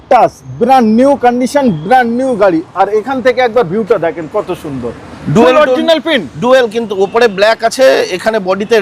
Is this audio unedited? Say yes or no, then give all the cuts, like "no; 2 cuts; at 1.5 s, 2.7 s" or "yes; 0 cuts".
yes; 0 cuts